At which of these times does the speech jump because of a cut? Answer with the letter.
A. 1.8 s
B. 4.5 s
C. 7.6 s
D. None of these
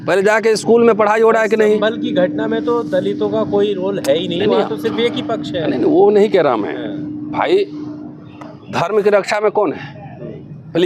D